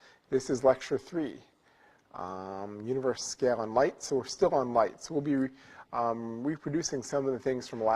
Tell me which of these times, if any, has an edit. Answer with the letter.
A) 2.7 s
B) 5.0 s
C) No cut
A